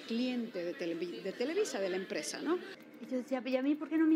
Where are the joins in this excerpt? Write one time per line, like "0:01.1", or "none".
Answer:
0:02.8